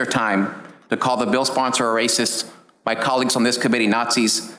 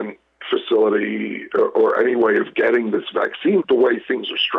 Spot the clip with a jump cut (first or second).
second